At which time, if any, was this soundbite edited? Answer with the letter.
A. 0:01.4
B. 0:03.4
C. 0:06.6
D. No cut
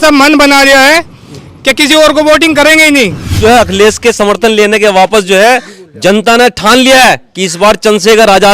B